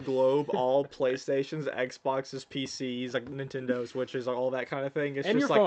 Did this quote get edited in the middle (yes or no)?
no